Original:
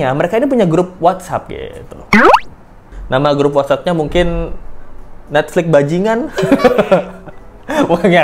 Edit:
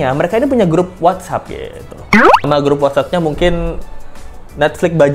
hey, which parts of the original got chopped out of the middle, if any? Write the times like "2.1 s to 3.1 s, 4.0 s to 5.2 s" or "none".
2.5 s to 3.2 s